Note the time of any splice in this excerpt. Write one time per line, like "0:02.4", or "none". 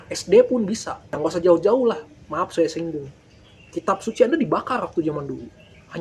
0:01.2